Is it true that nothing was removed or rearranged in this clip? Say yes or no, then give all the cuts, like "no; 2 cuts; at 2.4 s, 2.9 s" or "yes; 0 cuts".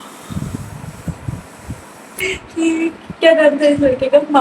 no; 1 cut; at 2.3 s